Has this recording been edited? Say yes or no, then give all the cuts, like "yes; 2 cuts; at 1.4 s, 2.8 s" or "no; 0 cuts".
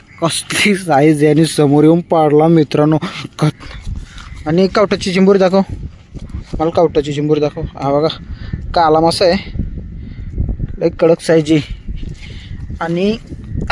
yes; 1 cut; at 3.6 s